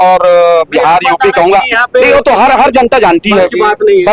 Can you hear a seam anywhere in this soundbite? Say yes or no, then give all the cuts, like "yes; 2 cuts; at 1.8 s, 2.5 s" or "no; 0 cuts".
no; 0 cuts